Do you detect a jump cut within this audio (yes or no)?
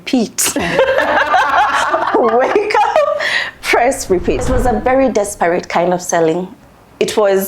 yes